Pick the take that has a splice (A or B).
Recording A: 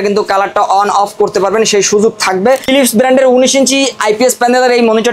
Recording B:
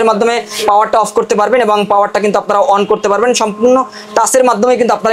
A